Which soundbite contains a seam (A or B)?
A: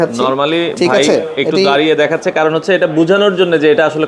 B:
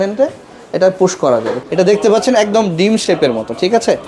B